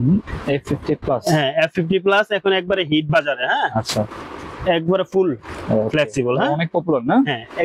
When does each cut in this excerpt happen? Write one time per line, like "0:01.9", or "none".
none